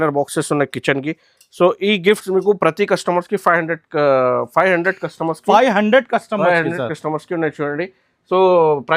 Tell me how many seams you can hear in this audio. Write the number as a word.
zero